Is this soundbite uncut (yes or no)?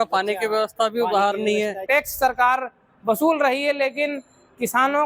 no